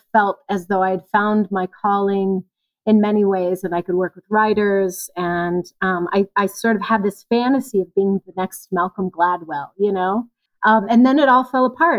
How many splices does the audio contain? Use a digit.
1